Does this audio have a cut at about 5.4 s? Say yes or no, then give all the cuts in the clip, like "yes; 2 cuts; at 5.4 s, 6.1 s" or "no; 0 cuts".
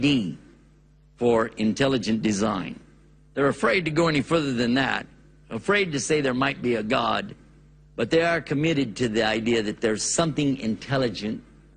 no; 0 cuts